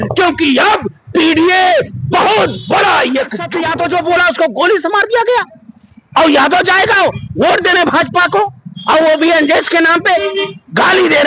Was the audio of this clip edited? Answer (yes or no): yes